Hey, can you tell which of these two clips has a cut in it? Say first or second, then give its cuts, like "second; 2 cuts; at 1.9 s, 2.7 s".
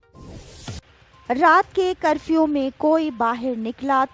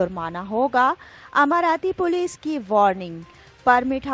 first; 1 cut; at 0.9 s